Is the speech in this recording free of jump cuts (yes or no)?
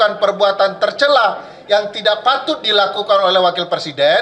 yes